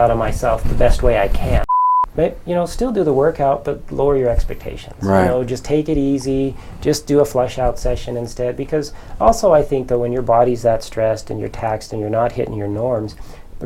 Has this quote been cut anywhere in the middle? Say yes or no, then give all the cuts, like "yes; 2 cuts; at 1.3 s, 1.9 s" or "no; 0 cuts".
yes; 1 cut; at 1.7 s